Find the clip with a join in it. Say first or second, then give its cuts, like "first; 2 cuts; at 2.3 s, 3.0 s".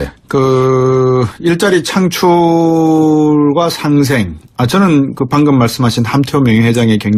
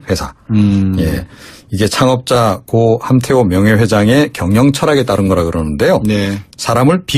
second; 1 cut; at 3.3 s